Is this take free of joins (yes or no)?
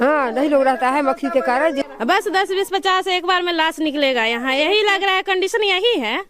no